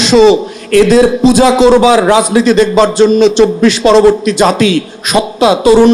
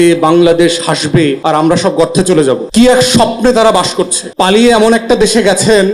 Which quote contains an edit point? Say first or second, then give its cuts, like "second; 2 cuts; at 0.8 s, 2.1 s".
second; 3 cuts; at 1.4 s, 2.6 s, 4.2 s